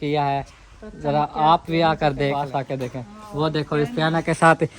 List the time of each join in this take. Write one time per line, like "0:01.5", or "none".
0:02.4